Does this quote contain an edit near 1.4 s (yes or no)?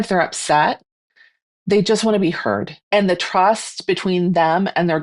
no